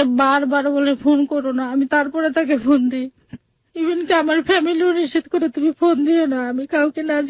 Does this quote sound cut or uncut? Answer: uncut